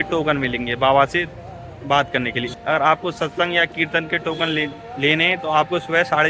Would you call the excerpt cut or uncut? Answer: cut